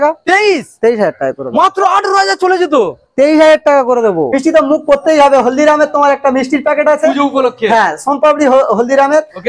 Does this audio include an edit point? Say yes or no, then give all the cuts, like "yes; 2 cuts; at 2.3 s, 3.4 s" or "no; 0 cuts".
yes; 1 cut; at 4.3 s